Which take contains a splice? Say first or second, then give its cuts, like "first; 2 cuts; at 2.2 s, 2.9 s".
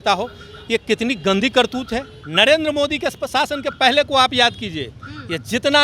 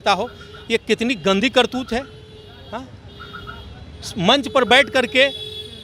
first; 1 cut; at 2.2 s